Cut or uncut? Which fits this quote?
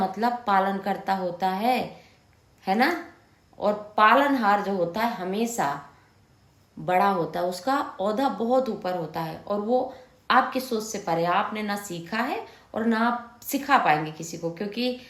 uncut